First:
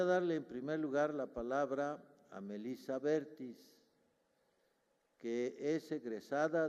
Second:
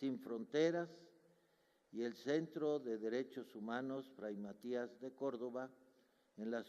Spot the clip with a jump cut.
second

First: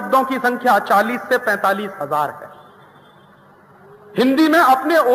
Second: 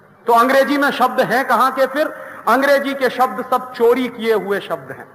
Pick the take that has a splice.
first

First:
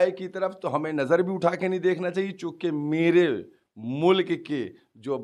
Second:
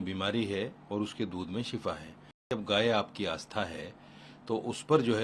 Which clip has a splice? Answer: second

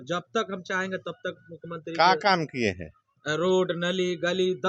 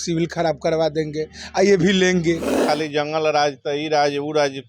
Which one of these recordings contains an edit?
second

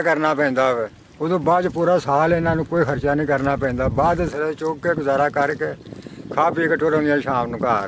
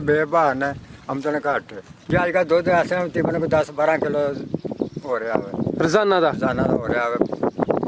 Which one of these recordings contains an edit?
second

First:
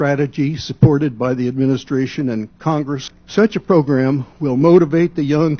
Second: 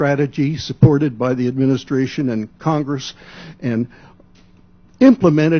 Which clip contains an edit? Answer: first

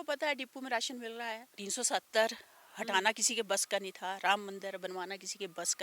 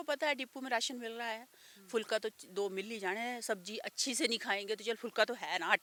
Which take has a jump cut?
first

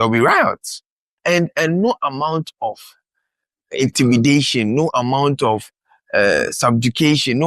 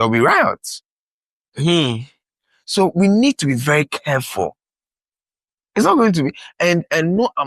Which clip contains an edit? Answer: first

